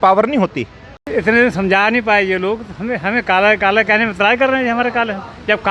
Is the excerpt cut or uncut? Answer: cut